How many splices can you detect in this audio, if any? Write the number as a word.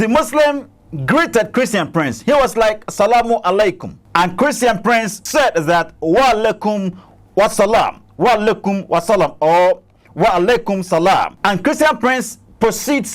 three